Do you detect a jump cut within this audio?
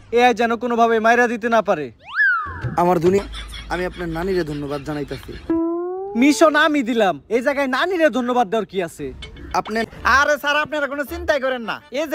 yes; 2 cuts; at 3.2 s, 9.8 s

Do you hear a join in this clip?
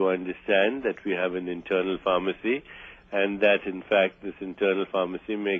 yes; 1 cut; at 1.1 s

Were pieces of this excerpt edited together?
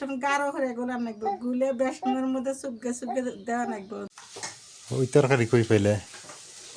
yes; 1 cut; at 4.1 s

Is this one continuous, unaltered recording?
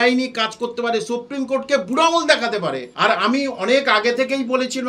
no; 1 cut; at 2.9 s

